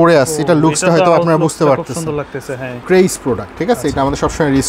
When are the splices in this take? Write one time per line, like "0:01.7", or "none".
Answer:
0:02.7

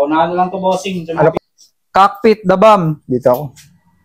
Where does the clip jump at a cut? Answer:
0:01.3

